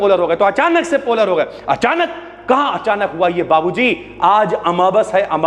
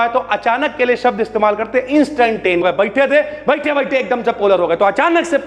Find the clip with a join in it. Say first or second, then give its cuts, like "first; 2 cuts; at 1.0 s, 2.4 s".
second; 1 cut; at 2.6 s